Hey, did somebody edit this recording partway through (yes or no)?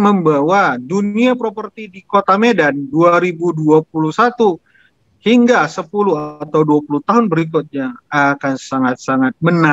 no